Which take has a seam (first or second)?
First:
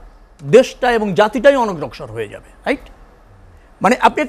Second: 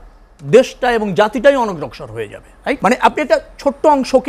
second